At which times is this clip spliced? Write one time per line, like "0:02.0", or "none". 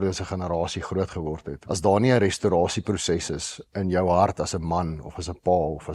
0:01.5